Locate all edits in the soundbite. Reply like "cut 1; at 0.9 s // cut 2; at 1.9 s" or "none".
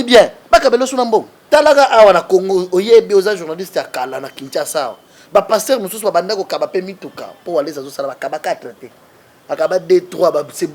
cut 1; at 1.4 s